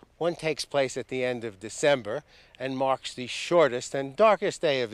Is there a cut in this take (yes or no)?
no